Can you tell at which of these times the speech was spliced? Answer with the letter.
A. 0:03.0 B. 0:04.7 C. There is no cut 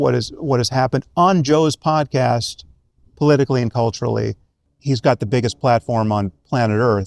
B